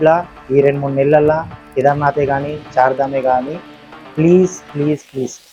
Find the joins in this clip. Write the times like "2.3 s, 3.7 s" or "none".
none